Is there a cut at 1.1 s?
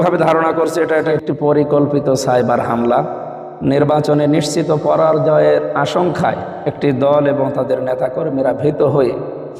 yes; 1 cut; at 1.1 s

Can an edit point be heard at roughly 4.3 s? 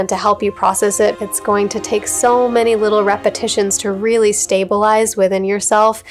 no; 1 cut; at 1.2 s

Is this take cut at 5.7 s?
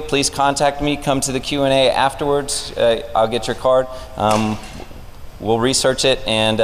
yes; 1 cut; at 5.7 s

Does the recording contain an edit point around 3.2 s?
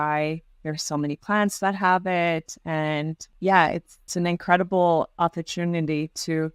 yes; 2 cuts; at 3.2 s, 4.0 s

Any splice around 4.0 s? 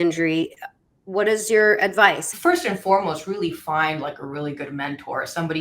no; 1 cut; at 2.3 s

